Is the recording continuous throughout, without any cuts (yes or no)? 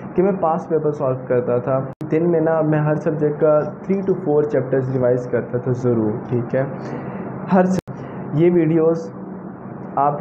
no